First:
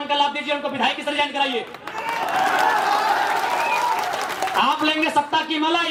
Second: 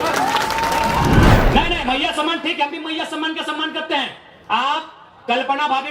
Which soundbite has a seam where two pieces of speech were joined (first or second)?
second